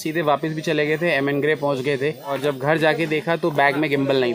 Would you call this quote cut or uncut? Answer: cut